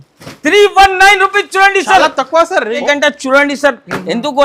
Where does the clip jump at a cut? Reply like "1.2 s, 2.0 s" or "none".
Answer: 2.8 s